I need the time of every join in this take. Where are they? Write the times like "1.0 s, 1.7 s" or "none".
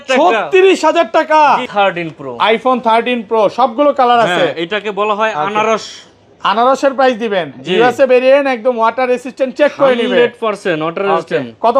1.7 s